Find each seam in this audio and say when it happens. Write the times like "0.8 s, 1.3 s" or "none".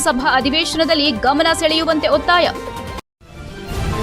2.9 s